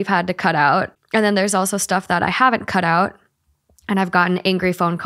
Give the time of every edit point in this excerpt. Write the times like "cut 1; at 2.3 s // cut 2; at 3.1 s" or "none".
none

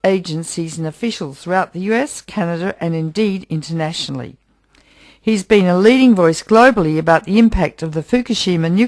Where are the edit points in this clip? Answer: none

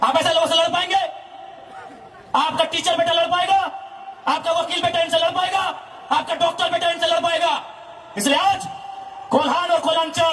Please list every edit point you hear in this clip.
none

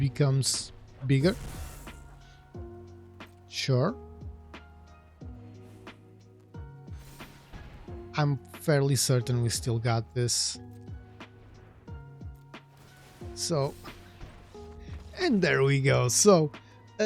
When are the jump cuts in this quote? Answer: cut 1; at 1.9 s // cut 2; at 3.6 s // cut 3; at 4.4 s // cut 4; at 7.5 s

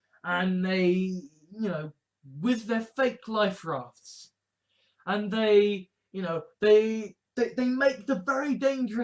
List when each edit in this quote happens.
none

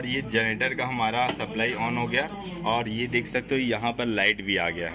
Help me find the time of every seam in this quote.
none

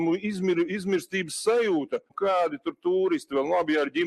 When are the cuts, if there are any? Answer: cut 1; at 2.1 s

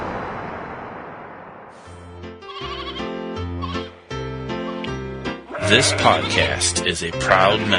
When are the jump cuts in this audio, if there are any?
cut 1; at 2.0 s

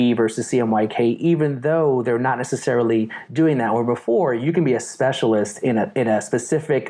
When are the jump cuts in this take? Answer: none

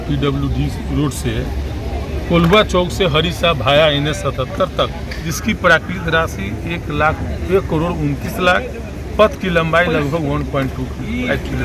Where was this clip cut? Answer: cut 1; at 5.2 s

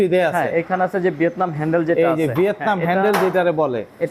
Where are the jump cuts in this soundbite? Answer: none

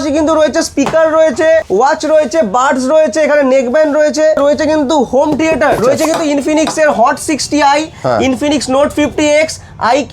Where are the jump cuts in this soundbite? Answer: cut 1; at 1.7 s // cut 2; at 4.4 s // cut 3; at 5.8 s

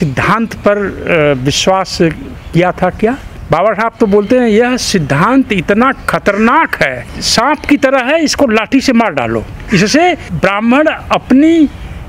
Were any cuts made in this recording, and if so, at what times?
cut 1; at 3.3 s // cut 2; at 7.0 s // cut 3; at 9.6 s // cut 4; at 10.3 s

